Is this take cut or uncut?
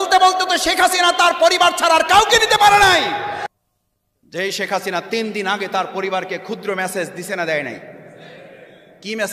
uncut